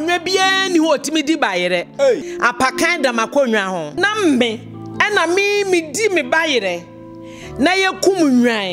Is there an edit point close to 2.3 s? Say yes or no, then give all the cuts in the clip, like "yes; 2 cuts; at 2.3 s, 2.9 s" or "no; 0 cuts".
yes; 2 cuts; at 2.3 s, 3.9 s